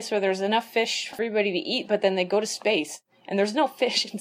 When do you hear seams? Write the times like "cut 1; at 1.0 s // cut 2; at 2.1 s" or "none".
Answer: cut 1; at 1.2 s